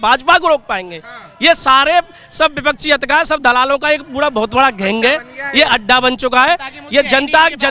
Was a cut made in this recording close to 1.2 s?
no; 0 cuts

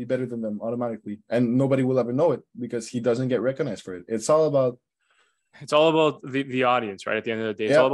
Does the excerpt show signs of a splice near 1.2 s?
no; 0 cuts

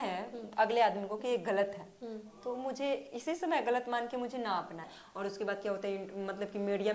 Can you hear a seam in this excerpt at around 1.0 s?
no; 1 cut; at 5.0 s

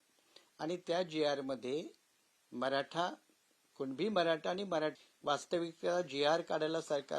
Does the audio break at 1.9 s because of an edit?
no; 1 cut; at 4.9 s

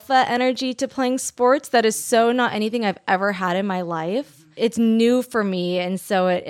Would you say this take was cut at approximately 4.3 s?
yes; 1 cut; at 4.3 s

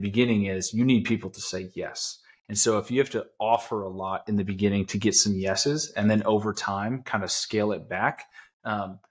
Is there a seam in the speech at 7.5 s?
no; 0 cuts

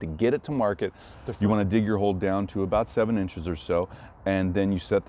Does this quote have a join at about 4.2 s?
no; 1 cut; at 1.2 s

